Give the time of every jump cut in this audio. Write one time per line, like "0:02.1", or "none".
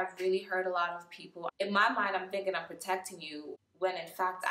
0:01.5